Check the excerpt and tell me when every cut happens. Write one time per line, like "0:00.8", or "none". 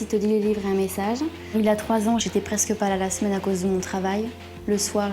0:01.4